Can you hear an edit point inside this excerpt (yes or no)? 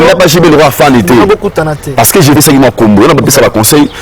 yes